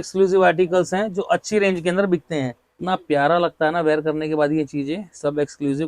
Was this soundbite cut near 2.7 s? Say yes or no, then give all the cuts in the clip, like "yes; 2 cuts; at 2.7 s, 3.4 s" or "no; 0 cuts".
yes; 1 cut; at 2.7 s